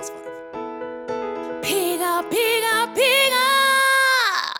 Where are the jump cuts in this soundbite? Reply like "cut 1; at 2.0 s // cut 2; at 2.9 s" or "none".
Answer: none